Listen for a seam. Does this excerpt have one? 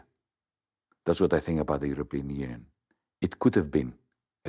no; 0 cuts

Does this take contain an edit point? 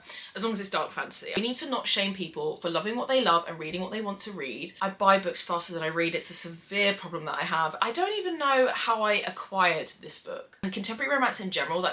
yes; 4 cuts; at 1.4 s, 4.7 s, 7.8 s, 10.6 s

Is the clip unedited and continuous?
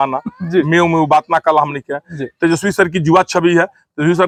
yes; 0 cuts

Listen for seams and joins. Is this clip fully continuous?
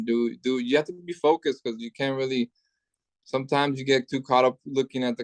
yes; 0 cuts

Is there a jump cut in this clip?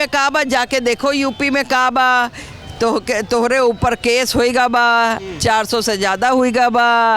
no; 0 cuts

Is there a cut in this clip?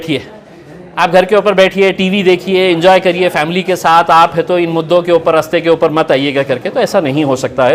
no; 0 cuts

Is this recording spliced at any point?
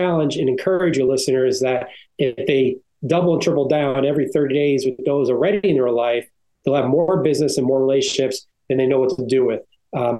no; 0 cuts

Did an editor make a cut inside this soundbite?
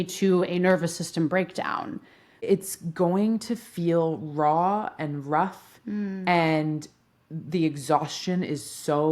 yes; 1 cut; at 2.3 s

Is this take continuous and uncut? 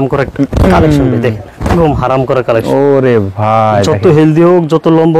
yes; 0 cuts

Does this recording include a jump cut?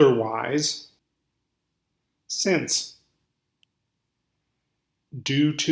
yes; 2 cuts; at 1.0 s, 3.3 s

